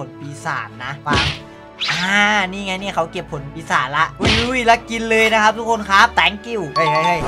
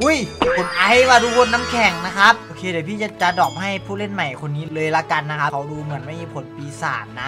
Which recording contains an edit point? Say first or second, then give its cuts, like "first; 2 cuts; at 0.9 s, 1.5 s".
first; 2 cuts; at 1.9 s, 6.1 s